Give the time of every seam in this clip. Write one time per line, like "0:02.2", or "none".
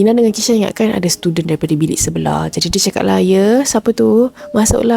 none